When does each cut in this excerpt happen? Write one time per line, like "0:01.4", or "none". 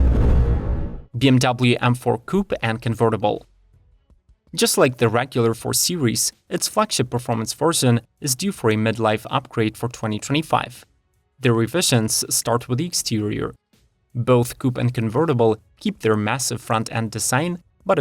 0:01.0